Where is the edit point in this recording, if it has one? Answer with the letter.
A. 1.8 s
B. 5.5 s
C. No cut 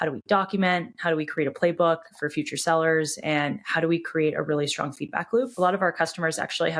B